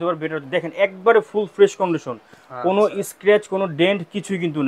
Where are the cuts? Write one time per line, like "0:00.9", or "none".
none